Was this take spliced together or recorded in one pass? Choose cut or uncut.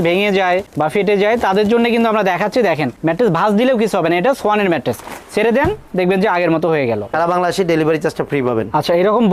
cut